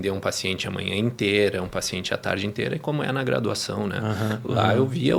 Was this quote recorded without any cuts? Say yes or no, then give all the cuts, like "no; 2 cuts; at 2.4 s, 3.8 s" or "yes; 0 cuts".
yes; 0 cuts